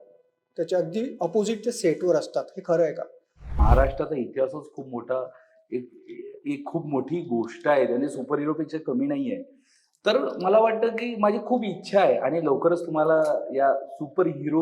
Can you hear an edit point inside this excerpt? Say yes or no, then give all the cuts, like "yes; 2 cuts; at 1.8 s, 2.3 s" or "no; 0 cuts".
yes; 1 cut; at 3.6 s